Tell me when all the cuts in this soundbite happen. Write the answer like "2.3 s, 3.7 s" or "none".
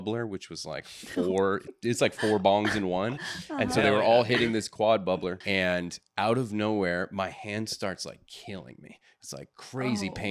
5.4 s

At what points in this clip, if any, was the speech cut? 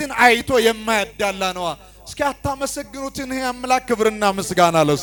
none

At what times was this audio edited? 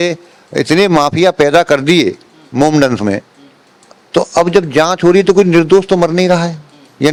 none

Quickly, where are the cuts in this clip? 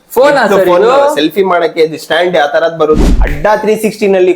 3.0 s

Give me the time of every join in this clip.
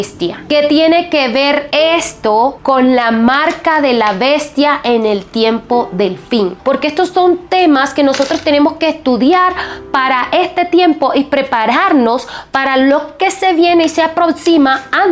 6.6 s

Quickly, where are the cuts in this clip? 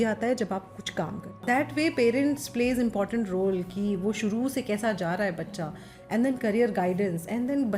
1.4 s

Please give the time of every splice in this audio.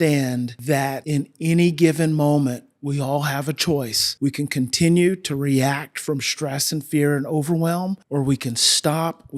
0.9 s, 4.0 s, 8.0 s

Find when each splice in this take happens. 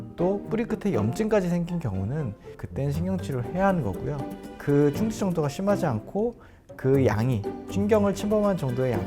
2.5 s, 4.6 s

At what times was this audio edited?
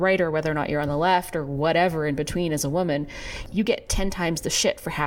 3.4 s

